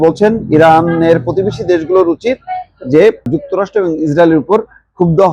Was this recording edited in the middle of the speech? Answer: yes; 1 cut; at 3.3 s

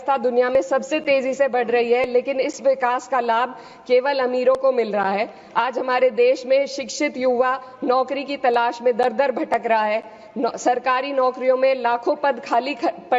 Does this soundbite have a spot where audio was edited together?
no; 0 cuts

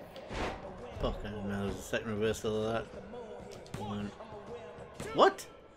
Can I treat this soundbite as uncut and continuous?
yes; 0 cuts

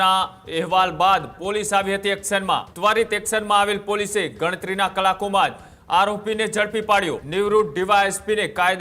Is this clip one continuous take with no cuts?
no; 2 cuts; at 2.7 s, 7.2 s

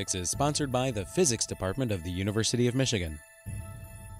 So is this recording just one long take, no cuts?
no; 1 cut; at 3.3 s

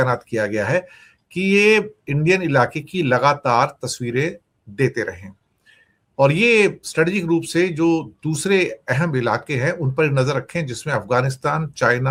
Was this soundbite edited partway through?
no; 0 cuts

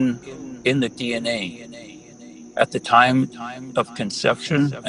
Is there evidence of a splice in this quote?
no; 0 cuts

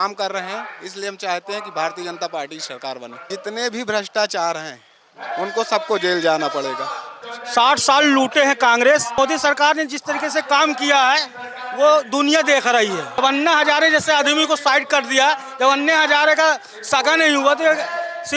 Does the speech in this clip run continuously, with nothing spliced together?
no; 4 cuts; at 3.3 s, 7.4 s, 9.2 s, 13.2 s

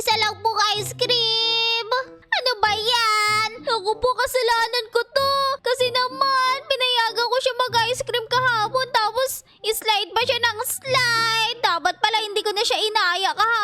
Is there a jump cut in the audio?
yes; 1 cut; at 2.2 s

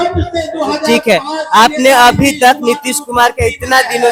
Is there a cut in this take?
no; 0 cuts

